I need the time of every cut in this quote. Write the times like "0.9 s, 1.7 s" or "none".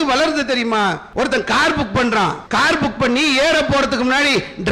1.0 s, 2.4 s